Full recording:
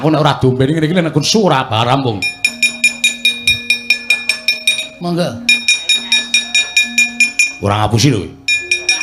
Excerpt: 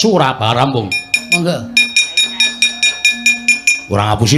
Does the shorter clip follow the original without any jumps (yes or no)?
no